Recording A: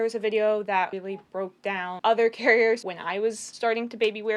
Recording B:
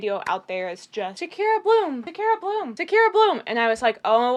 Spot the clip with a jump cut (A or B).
A